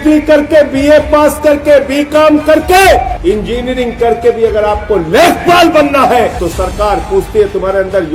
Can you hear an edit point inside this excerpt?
yes; 2 cuts; at 3.1 s, 6.4 s

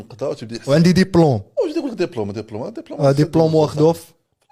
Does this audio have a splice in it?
no; 0 cuts

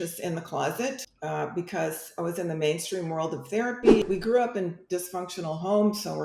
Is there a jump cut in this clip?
yes; 2 cuts; at 1.1 s, 4.0 s

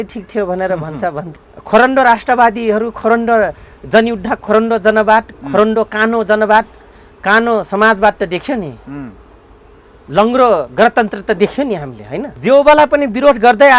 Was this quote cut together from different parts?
yes; 2 cuts; at 1.3 s, 12.3 s

